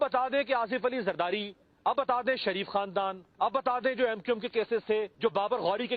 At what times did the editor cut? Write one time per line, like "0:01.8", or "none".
0:01.9
0:03.5
0:05.1

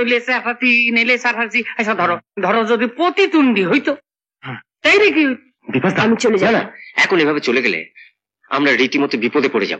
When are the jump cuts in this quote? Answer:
0:05.5

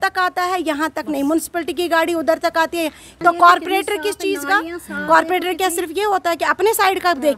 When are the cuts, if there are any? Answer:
0:03.1

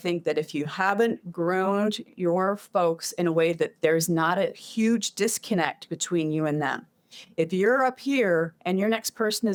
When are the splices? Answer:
none

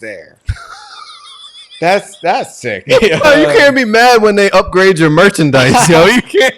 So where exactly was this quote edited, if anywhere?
0:03.2

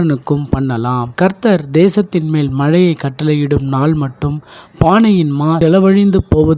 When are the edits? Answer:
0:01.0

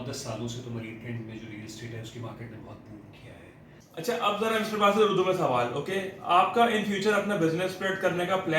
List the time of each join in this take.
0:03.9

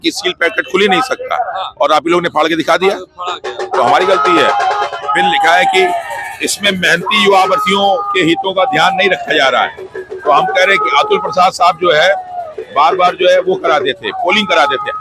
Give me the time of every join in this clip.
none

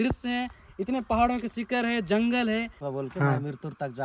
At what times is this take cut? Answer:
0:02.8

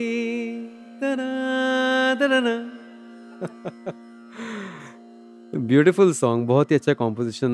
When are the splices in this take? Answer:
0:02.8

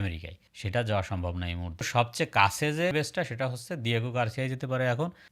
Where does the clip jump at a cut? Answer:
0:01.9
0:02.9

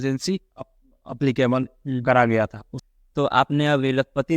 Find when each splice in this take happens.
0:02.7

